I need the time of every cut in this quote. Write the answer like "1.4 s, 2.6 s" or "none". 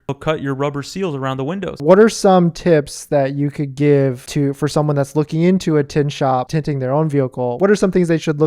1.7 s, 6.5 s, 7.5 s